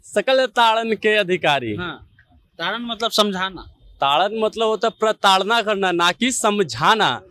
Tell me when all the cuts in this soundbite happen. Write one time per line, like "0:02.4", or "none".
none

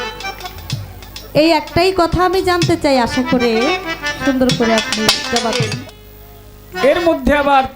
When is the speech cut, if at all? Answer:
0:05.7

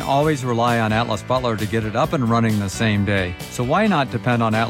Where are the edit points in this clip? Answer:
0:03.4

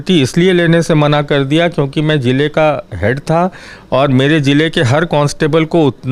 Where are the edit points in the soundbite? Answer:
none

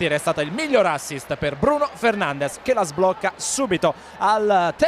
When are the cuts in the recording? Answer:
0:01.2

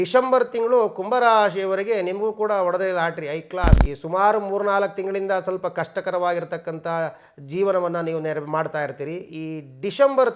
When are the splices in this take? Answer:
0:03.8

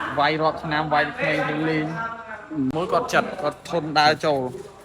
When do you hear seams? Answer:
0:02.7

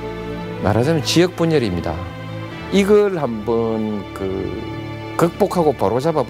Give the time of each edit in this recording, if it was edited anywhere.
0:02.5

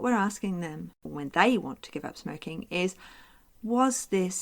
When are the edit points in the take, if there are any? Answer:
0:01.0

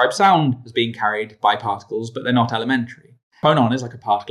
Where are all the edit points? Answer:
0:03.2

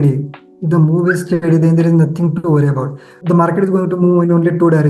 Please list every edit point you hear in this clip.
0:03.2

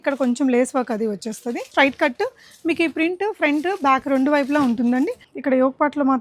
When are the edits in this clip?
0:01.7
0:05.3

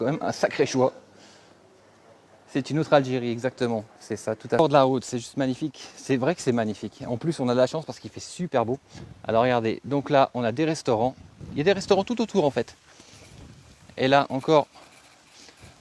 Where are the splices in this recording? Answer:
0:04.6

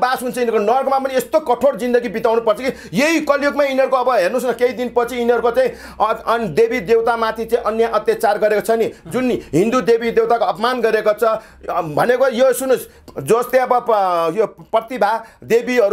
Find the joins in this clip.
none

